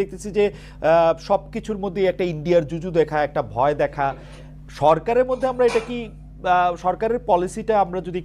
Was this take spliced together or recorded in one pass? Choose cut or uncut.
uncut